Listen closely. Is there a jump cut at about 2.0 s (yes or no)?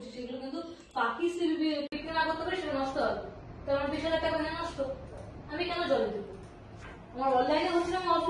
yes